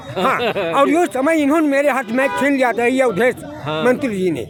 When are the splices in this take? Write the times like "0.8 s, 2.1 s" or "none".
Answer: none